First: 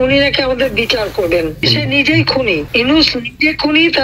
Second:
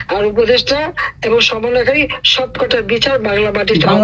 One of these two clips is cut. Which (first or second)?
first